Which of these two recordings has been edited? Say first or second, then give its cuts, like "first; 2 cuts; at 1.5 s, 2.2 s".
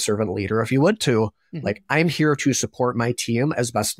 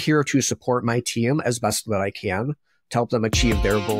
second; 1 cut; at 2.8 s